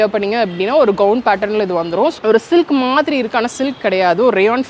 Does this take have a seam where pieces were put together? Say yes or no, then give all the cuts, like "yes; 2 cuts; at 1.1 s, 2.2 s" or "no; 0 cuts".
yes; 1 cut; at 2.1 s